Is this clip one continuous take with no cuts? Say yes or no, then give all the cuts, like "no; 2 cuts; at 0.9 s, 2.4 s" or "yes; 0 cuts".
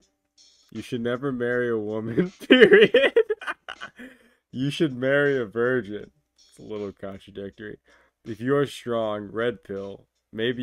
yes; 0 cuts